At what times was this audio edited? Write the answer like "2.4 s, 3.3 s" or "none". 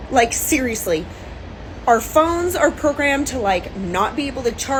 none